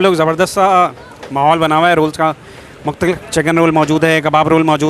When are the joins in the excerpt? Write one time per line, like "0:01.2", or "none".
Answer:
0:03.2